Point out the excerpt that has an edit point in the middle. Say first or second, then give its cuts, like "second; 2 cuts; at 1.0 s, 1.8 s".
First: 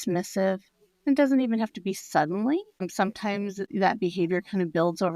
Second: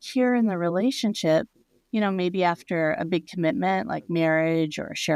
first; 1 cut; at 3.1 s